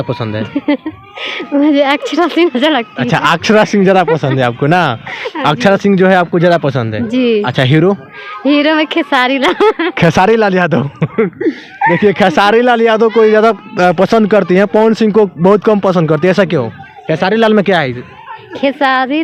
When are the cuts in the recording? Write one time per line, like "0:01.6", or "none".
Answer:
none